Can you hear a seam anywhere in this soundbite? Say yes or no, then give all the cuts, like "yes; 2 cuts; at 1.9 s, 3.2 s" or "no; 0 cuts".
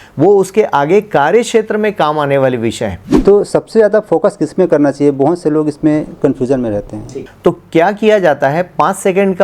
yes; 2 cuts; at 3.0 s, 6.9 s